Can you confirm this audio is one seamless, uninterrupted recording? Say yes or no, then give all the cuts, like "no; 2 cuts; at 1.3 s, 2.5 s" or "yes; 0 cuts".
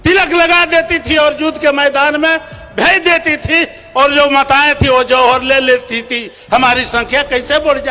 yes; 0 cuts